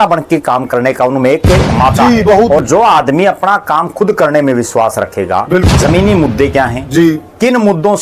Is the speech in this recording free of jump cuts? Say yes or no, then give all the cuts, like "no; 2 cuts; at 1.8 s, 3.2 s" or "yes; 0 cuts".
no; 2 cuts; at 2.6 s, 5.7 s